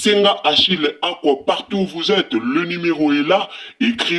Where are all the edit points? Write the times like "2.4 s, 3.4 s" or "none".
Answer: none